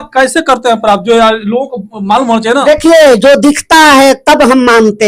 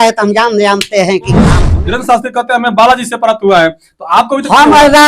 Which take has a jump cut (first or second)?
second